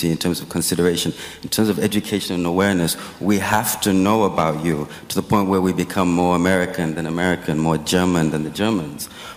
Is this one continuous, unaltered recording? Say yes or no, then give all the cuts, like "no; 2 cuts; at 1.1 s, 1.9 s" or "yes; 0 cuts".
yes; 0 cuts